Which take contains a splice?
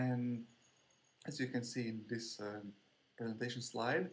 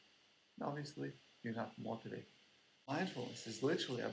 second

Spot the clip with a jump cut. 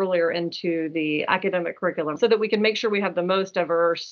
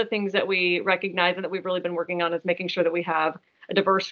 first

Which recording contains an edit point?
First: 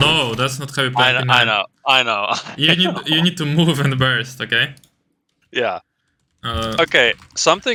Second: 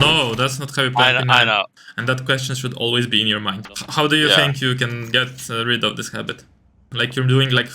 second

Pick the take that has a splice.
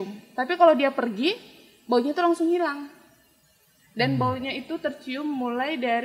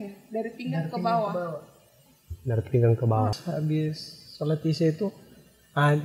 second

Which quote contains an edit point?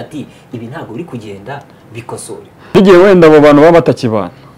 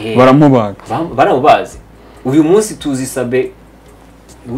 first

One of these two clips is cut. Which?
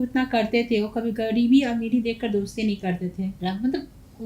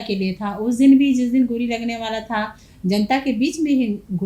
first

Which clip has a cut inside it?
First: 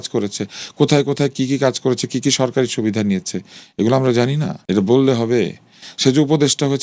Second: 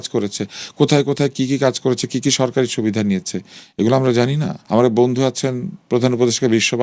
second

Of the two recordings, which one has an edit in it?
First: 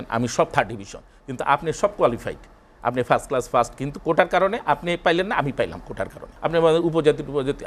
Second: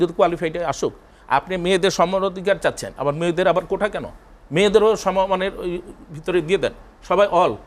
first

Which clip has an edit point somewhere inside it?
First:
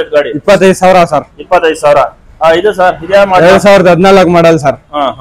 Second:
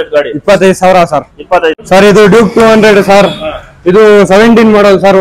second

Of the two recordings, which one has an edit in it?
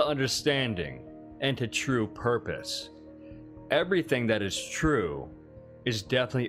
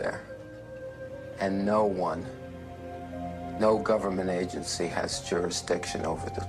first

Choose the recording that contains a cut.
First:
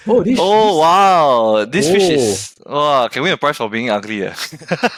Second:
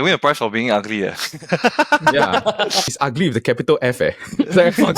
second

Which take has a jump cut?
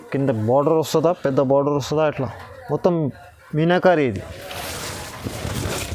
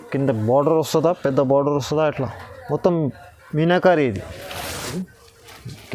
second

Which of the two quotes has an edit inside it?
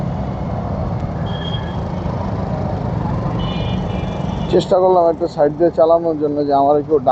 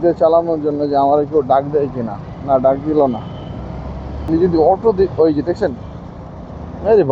second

